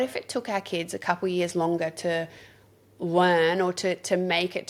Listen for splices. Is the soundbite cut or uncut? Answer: uncut